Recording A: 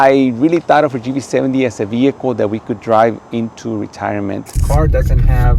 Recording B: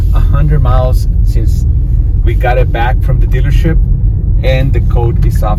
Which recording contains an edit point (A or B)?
A